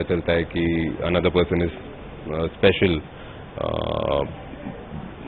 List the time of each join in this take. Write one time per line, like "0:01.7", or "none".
none